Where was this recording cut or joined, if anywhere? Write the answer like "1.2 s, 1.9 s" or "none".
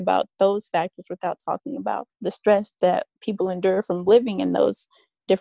2.1 s, 3.2 s